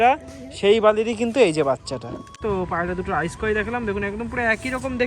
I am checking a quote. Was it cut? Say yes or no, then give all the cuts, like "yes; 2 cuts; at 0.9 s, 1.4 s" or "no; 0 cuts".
yes; 1 cut; at 2.4 s